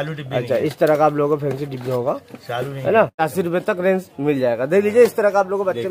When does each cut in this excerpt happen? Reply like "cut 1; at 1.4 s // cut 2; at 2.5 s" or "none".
cut 1; at 3.2 s